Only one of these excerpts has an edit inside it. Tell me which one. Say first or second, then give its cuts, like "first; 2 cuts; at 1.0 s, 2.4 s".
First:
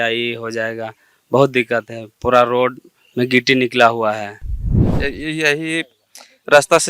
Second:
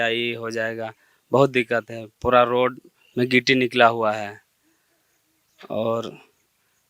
first; 1 cut; at 4.8 s